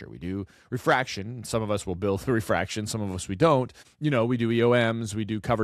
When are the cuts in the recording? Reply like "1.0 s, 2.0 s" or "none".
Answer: 3.8 s

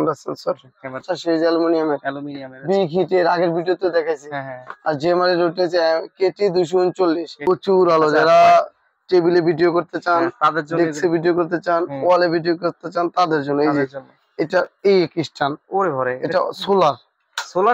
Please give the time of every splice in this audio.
1.0 s, 7.4 s

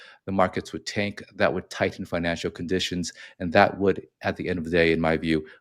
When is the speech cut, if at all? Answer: none

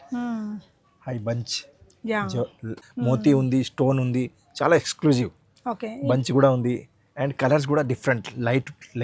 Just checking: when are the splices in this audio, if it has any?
2.8 s

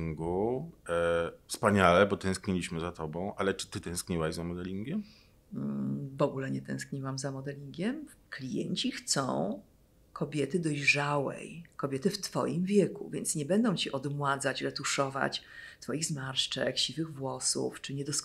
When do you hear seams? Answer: 8.1 s

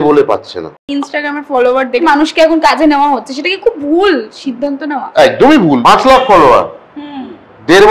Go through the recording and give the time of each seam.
0.9 s, 2.0 s, 5.8 s

